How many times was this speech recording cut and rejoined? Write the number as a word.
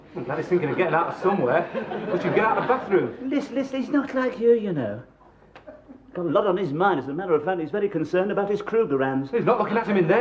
one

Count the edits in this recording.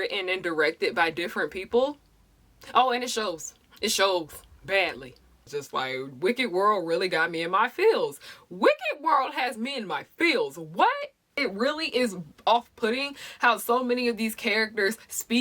two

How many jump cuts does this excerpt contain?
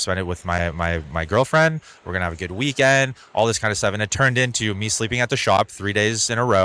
zero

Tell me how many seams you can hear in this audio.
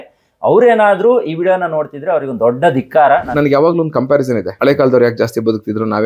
two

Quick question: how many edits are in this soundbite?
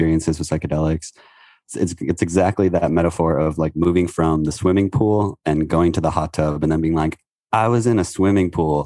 one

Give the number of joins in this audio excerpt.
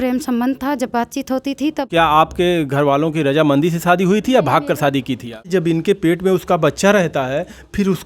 two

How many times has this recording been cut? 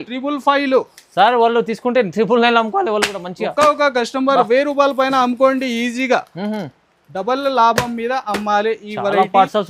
zero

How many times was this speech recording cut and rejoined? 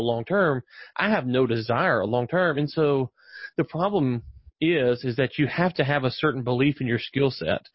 zero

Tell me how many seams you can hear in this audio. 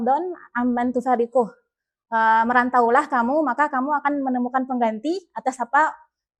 zero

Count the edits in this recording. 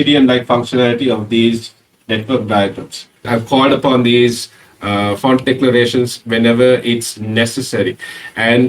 one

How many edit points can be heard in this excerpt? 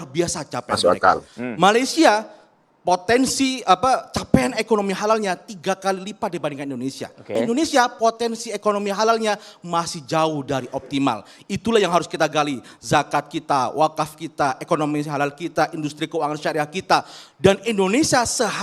one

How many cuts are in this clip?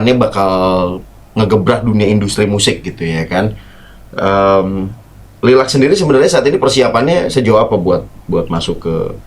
zero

